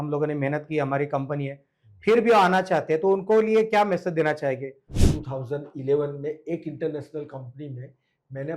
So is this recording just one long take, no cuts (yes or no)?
no